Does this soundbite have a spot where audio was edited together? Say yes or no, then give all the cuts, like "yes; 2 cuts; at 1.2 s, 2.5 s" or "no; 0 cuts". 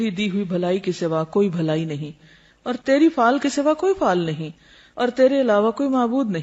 no; 0 cuts